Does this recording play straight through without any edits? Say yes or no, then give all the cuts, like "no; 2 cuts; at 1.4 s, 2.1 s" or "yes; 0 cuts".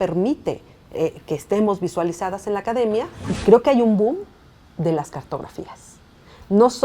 no; 1 cut; at 3.2 s